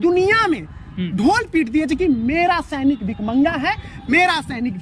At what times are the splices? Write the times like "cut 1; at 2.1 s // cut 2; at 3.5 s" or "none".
none

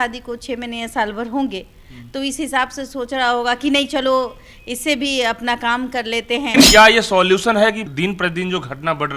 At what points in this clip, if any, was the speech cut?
cut 1; at 6.5 s

